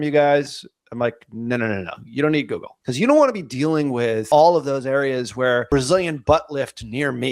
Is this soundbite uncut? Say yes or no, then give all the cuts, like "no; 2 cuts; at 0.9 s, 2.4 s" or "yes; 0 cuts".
no; 3 cuts; at 2.8 s, 4.2 s, 5.7 s